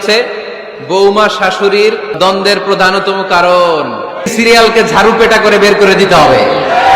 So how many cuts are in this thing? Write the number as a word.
two